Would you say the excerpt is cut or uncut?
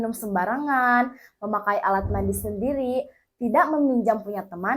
uncut